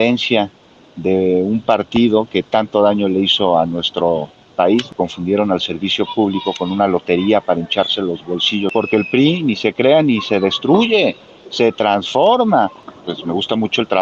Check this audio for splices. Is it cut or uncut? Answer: cut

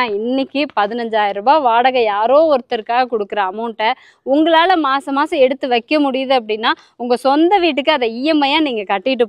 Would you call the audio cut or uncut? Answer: uncut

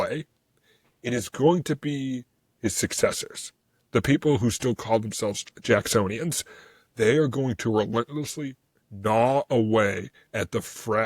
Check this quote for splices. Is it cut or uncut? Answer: cut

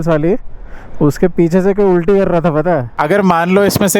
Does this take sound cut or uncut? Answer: cut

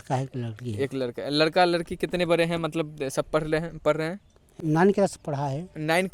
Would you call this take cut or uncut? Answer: cut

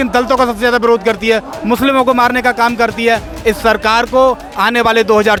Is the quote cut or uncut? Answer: uncut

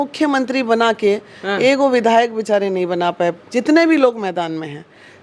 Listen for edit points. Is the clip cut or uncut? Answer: cut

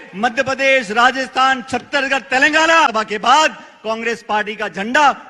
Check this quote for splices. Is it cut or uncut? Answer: cut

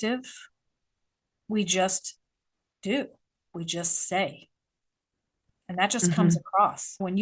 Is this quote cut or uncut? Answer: uncut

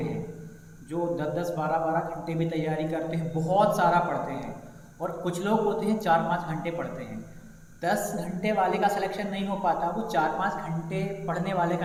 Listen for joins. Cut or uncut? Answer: uncut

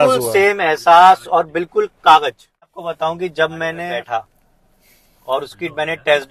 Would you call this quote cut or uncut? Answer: cut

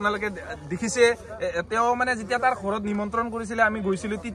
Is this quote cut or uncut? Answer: uncut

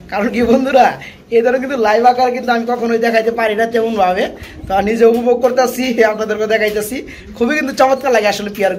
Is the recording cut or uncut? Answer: uncut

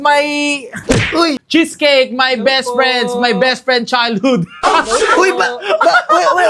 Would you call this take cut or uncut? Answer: cut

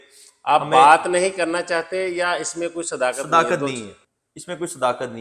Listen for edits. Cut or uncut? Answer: uncut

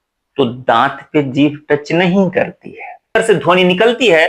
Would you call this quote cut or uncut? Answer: cut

